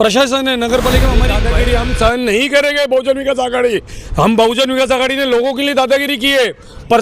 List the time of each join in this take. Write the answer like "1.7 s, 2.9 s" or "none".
1.4 s